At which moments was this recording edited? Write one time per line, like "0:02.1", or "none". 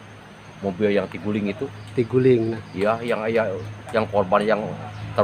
none